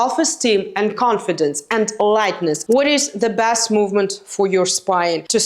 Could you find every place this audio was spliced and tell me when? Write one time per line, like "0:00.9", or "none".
0:02.6

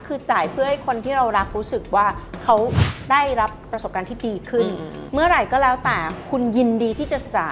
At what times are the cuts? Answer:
0:04.9

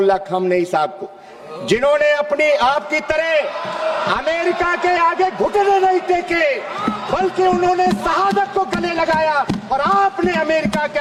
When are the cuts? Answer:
none

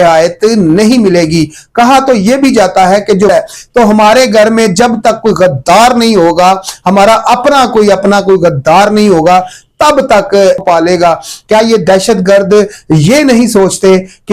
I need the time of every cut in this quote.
0:03.3
0:10.6

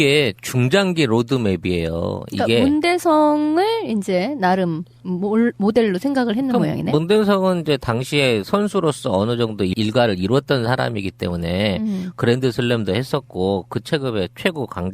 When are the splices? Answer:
0:11.4

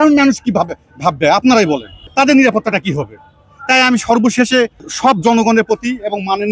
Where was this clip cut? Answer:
0:02.0
0:04.8

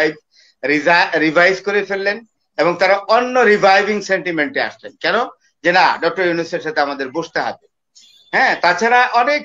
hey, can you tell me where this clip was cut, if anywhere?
none

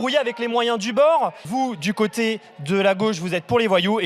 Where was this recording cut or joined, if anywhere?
0:01.4

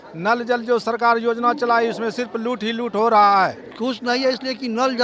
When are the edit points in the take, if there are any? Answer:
0:03.7

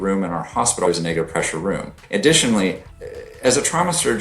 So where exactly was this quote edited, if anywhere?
0:00.9
0:02.0
0:02.9

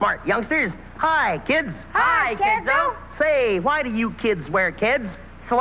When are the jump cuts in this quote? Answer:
none

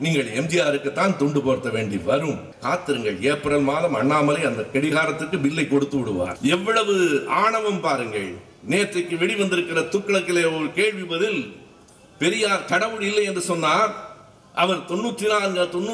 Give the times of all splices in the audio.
0:02.5
0:06.3

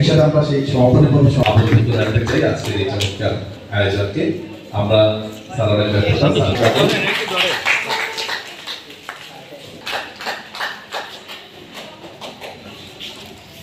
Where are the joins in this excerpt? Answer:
none

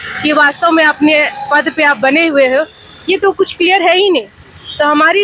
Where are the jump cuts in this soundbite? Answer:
none

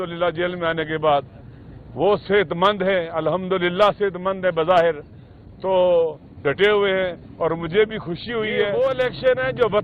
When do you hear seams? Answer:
0:08.7

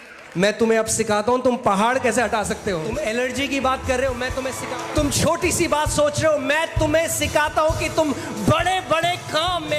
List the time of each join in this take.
0:02.9
0:04.6

